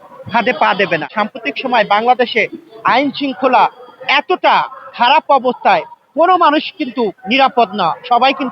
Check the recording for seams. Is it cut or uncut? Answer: cut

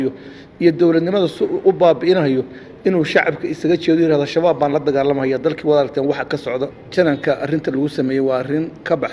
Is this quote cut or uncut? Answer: cut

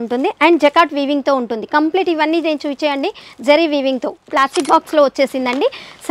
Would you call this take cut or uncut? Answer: cut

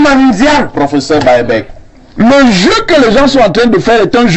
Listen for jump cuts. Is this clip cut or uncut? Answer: cut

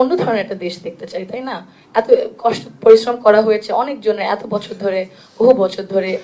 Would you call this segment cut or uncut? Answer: uncut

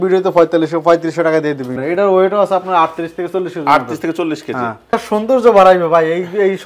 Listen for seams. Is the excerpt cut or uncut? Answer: cut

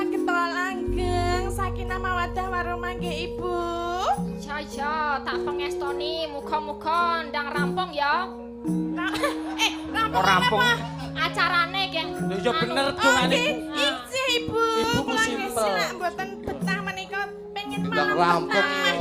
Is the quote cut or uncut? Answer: uncut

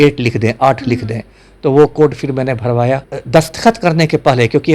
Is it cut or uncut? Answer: cut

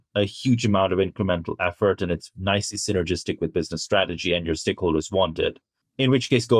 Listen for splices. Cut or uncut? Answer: uncut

